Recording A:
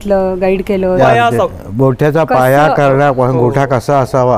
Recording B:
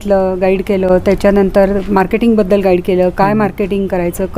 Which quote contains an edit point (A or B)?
A